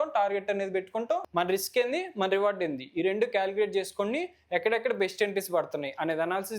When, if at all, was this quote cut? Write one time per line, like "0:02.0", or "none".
0:01.2